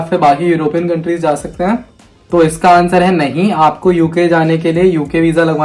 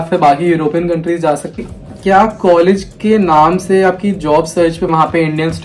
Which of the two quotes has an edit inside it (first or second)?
second